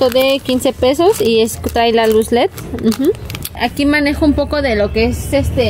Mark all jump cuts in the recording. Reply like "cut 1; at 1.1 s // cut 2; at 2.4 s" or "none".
cut 1; at 3.5 s